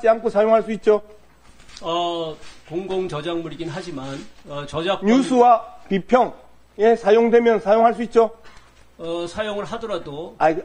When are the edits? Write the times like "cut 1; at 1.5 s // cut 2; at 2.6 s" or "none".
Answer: none